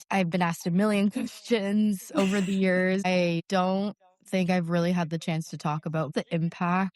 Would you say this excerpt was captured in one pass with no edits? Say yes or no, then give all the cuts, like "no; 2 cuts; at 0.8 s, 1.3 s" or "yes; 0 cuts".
no; 2 cuts; at 3.1 s, 6.1 s